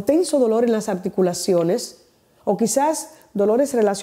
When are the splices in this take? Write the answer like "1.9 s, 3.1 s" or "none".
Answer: none